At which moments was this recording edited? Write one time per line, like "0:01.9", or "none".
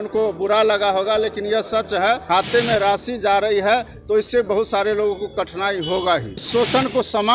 0:02.2
0:06.4